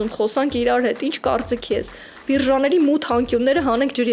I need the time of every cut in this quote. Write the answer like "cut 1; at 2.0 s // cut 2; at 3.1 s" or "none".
none